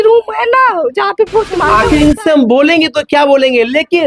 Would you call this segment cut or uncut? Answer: cut